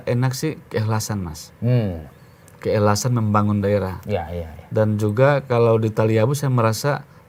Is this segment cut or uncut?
uncut